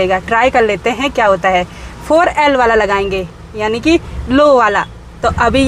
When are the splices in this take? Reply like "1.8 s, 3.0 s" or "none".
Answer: none